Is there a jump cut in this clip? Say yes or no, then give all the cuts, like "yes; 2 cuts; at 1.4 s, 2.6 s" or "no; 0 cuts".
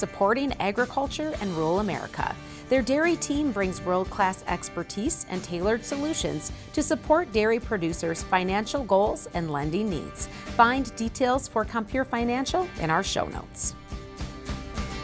yes; 1 cut; at 13.5 s